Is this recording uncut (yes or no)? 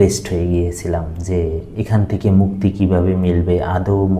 yes